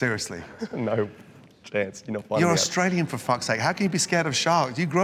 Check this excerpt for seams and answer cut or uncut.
uncut